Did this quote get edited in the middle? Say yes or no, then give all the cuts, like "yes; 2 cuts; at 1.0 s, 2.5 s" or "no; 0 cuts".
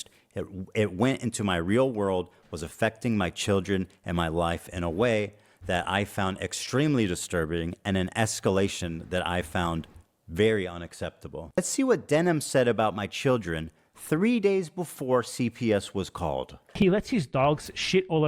yes; 1 cut; at 11.6 s